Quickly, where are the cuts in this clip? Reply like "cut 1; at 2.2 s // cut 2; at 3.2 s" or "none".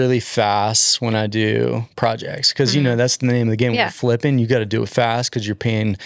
none